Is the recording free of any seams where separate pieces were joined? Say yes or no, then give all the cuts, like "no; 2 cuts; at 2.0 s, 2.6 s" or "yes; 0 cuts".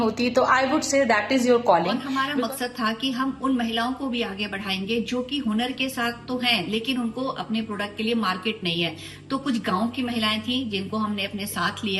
no; 1 cut; at 2.0 s